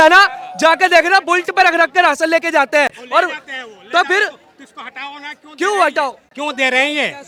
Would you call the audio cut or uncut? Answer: uncut